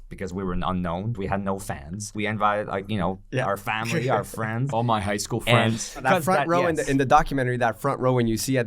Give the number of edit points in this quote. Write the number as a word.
three